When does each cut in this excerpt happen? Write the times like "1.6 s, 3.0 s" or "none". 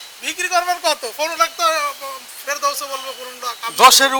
none